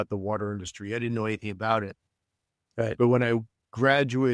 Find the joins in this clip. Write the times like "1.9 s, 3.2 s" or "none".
none

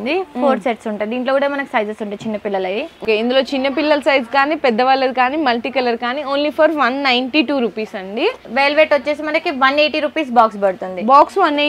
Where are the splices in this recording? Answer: 2.9 s, 8.4 s

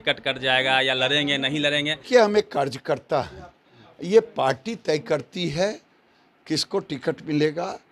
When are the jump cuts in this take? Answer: 2.1 s

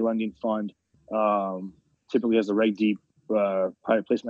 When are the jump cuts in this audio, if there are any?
none

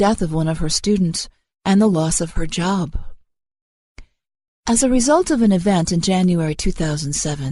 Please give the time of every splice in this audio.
1.9 s

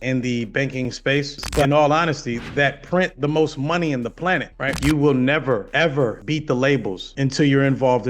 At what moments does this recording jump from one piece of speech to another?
1.7 s, 4.7 s

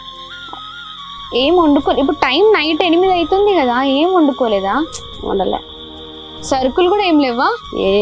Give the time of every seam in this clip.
none

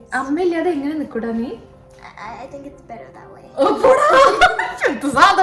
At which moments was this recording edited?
none

